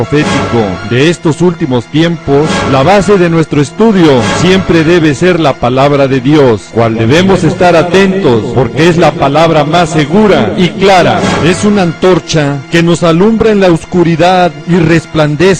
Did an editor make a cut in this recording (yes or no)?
no